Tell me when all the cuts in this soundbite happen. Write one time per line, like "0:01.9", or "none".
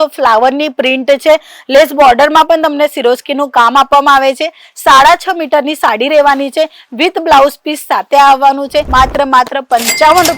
0:08.9